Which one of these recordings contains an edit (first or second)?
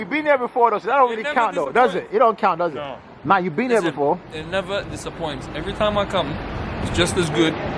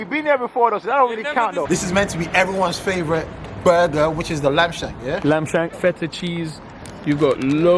second